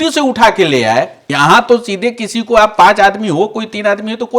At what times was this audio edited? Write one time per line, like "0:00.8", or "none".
0:01.2